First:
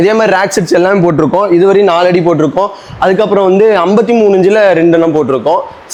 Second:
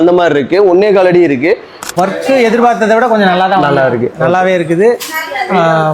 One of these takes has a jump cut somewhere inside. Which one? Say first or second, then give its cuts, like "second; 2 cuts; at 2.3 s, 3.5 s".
second; 1 cut; at 1.9 s